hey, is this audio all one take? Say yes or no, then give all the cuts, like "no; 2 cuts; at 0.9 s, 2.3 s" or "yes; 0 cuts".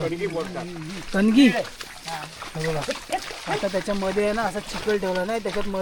yes; 0 cuts